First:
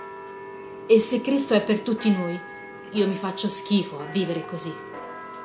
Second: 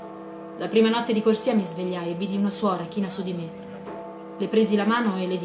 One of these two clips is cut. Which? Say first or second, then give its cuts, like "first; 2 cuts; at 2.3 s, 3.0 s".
first; 1 cut; at 4.5 s